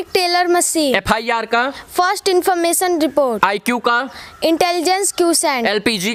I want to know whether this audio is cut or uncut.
uncut